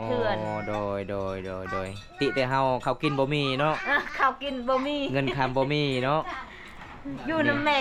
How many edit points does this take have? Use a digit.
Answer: 0